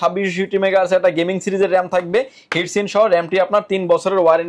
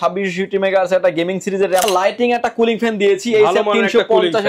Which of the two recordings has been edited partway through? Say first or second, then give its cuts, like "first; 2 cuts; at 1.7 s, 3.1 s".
second; 1 cut; at 1.9 s